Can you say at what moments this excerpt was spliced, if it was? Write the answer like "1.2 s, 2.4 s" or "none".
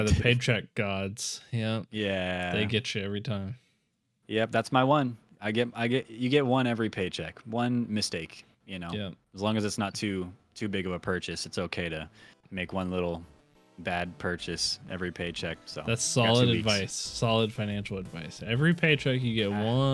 15.7 s